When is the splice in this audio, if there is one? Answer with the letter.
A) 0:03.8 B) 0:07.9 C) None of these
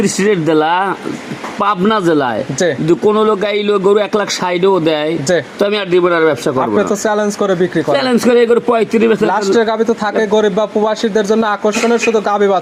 C